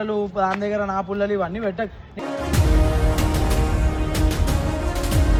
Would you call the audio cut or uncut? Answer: uncut